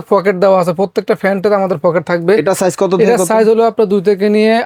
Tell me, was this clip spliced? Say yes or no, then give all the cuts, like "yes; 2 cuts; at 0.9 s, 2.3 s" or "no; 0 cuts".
no; 0 cuts